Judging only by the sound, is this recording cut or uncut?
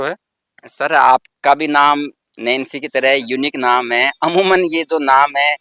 uncut